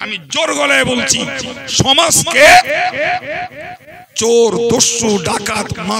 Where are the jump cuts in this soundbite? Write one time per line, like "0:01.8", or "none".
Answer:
none